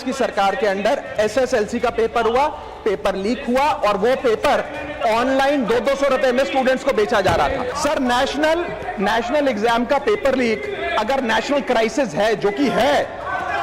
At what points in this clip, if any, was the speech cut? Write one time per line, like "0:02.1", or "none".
0:07.7